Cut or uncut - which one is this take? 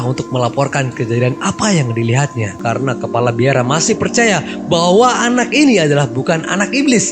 cut